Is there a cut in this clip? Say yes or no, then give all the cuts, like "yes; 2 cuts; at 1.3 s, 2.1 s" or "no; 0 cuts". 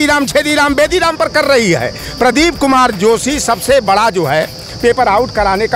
no; 0 cuts